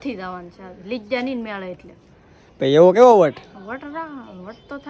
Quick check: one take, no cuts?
yes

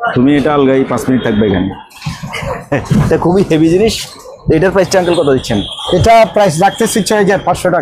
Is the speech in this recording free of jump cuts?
yes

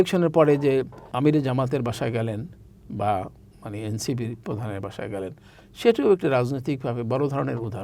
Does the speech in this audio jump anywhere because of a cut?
yes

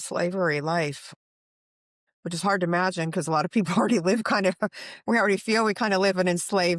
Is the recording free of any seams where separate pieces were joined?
yes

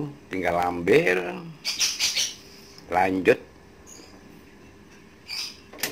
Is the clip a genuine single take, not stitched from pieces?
yes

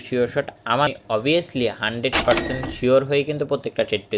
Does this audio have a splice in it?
yes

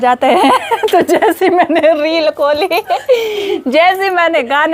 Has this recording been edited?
no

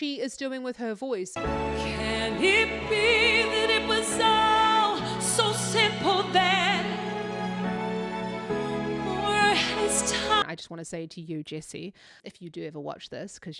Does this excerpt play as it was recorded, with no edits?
no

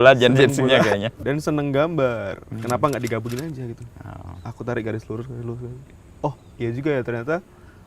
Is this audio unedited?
no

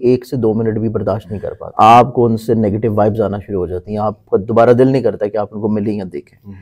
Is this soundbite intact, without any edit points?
no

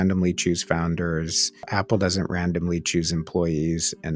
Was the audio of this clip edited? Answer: yes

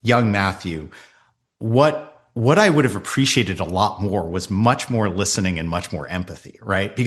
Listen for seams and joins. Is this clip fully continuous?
yes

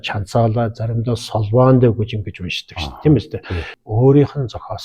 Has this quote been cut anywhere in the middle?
yes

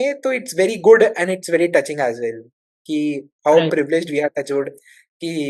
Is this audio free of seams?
yes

